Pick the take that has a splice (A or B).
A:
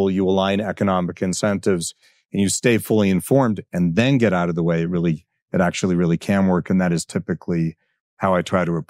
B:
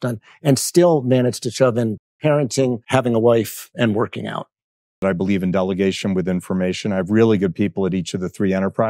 B